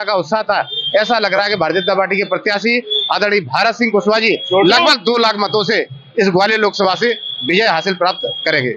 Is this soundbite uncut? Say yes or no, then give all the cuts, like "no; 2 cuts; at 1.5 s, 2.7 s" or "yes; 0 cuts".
yes; 0 cuts